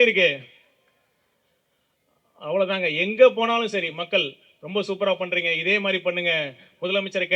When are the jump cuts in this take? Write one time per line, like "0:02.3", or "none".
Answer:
none

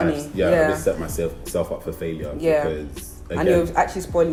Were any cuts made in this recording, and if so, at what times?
none

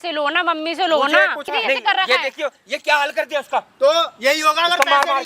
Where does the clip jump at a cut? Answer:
0:01.5

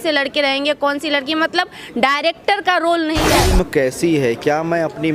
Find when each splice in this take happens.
0:03.3

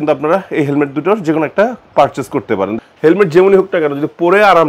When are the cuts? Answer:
0:02.8

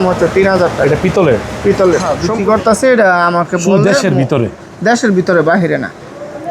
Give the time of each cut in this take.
0:02.2

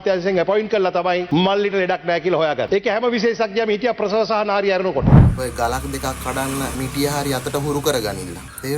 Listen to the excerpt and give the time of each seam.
0:01.2
0:02.7
0:05.2
0:06.7

